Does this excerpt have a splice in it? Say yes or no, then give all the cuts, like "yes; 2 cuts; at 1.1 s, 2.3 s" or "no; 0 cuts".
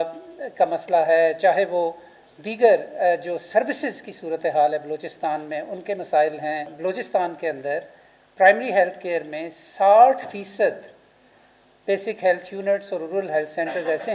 yes; 1 cut; at 6.7 s